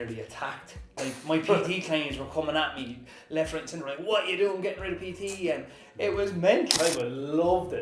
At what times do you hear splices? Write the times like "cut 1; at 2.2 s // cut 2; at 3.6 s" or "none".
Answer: cut 1; at 6.7 s